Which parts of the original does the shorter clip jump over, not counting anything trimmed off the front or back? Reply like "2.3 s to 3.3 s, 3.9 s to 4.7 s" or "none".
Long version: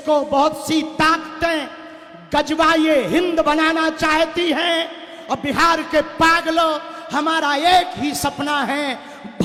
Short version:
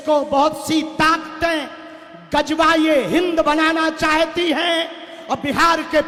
none